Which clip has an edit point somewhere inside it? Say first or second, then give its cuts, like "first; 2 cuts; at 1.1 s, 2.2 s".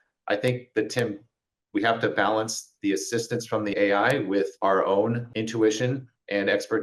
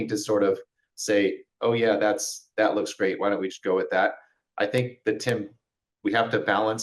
first; 3 cuts; at 3.7 s, 4.5 s, 5.3 s